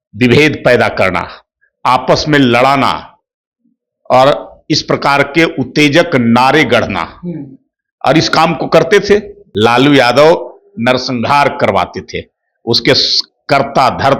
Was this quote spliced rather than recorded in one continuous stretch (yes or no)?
yes